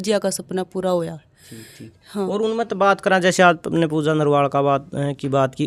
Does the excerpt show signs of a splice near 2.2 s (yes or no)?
no